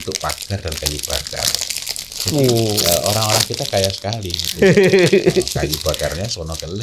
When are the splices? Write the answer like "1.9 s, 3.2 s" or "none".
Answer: none